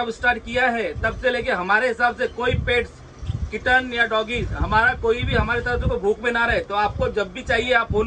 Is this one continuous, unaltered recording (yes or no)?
yes